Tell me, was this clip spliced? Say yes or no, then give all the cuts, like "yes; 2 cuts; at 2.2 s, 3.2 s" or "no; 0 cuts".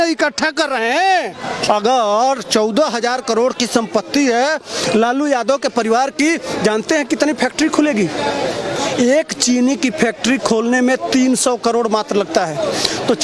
yes; 1 cut; at 1.6 s